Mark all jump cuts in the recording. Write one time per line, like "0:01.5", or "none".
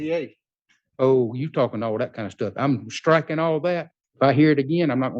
0:04.0